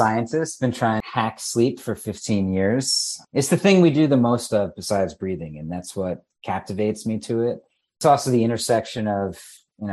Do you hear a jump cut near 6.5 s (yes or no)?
no